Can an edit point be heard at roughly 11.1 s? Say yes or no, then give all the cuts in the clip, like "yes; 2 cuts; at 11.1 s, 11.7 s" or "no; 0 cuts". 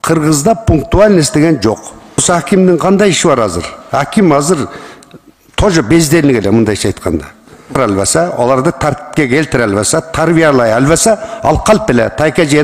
no; 2 cuts; at 2.2 s, 7.7 s